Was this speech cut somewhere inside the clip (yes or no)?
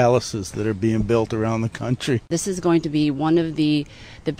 yes